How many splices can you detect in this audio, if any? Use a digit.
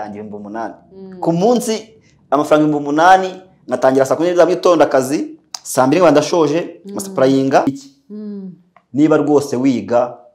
1